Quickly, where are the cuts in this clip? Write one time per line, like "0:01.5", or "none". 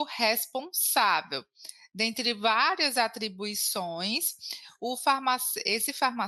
none